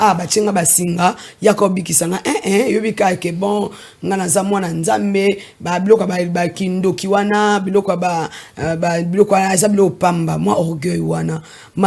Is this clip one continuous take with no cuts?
yes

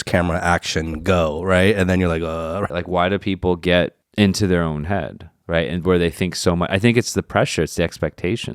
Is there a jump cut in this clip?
yes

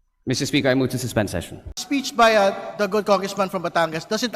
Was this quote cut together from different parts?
yes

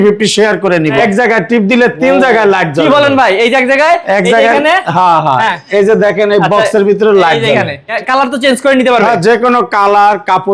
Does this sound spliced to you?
yes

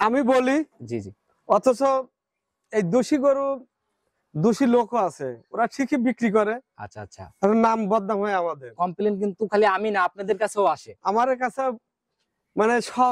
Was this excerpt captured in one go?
yes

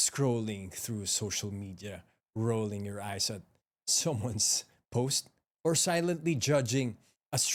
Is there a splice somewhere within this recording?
no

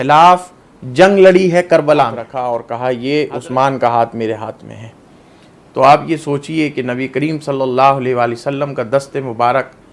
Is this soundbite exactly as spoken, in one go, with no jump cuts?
no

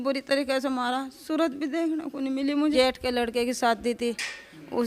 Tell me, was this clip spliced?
yes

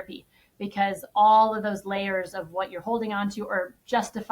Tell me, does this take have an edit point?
no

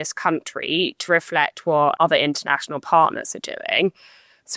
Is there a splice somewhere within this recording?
yes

